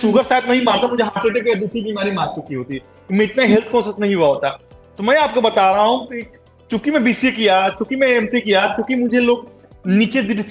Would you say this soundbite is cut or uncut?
uncut